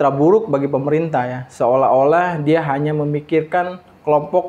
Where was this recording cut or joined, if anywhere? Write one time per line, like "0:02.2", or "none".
none